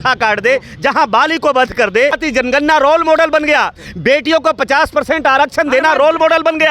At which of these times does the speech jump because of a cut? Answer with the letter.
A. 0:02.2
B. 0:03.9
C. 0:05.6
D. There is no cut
A